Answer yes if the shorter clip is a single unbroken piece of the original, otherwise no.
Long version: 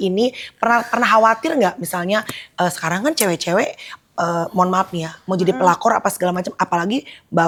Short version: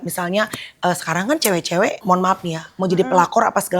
no